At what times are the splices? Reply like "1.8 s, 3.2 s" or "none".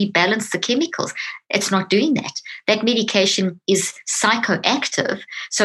3.6 s